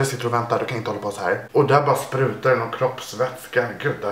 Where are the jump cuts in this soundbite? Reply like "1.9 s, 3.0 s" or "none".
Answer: 1.4 s